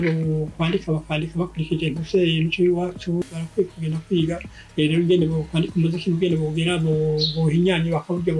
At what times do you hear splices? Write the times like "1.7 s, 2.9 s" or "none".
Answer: 3.4 s